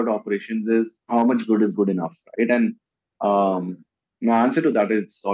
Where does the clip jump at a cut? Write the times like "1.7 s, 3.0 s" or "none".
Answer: 1.0 s